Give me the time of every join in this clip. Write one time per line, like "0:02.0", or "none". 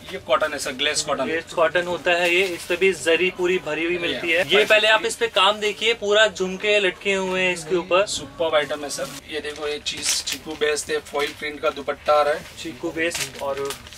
0:04.5
0:09.2